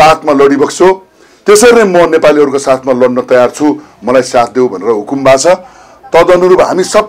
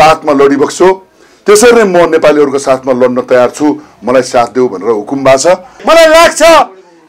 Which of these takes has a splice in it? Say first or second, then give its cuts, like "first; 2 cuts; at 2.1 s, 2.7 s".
second; 1 cut; at 5.7 s